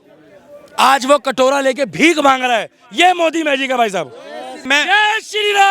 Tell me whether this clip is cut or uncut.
cut